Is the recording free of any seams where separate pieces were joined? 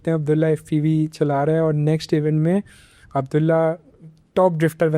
yes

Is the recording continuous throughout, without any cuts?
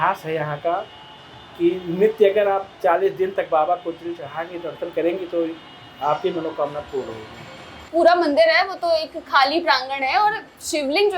no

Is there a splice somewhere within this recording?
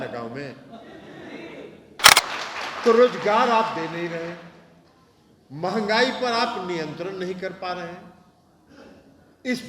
yes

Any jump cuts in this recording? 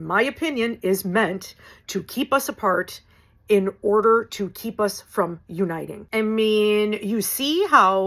no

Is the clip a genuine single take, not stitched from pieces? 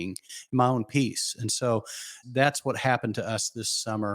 no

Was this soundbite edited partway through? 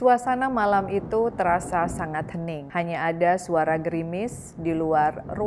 no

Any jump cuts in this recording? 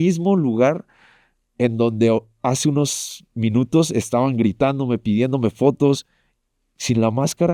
no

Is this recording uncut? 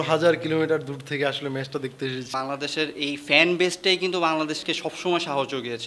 no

